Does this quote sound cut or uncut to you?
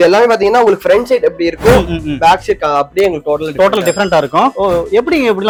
uncut